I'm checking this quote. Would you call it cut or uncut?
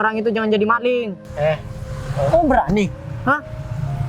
cut